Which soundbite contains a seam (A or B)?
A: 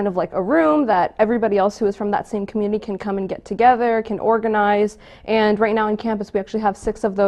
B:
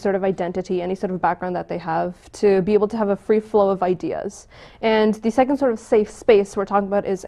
B